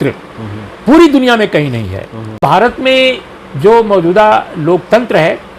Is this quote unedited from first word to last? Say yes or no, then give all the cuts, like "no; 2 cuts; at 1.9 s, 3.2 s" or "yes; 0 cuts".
no; 1 cut; at 2.4 s